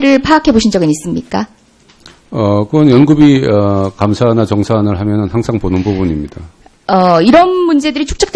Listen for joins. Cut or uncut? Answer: uncut